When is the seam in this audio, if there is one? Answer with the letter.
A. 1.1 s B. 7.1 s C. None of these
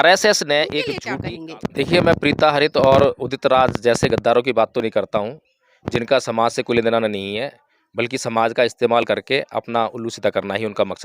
A